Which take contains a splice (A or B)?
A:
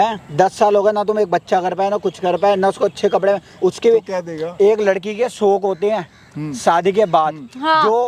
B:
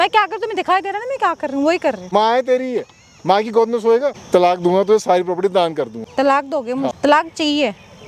B